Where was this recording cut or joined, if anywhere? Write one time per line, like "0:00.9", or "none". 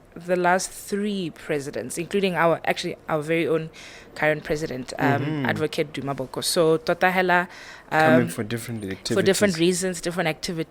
none